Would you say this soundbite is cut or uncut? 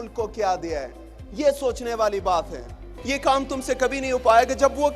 cut